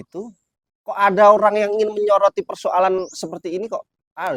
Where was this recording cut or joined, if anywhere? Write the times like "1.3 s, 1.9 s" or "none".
none